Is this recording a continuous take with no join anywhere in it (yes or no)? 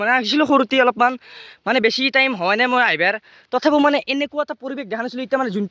yes